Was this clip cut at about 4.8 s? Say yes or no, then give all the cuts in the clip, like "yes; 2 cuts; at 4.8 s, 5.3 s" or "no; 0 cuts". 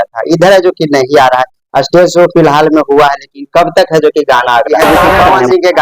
yes; 1 cut; at 4.8 s